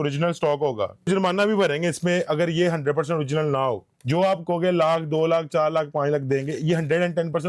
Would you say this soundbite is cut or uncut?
cut